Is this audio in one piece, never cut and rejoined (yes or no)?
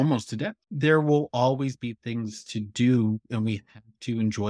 yes